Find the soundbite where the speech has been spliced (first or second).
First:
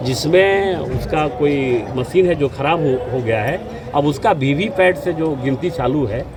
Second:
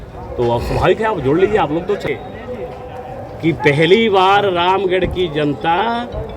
second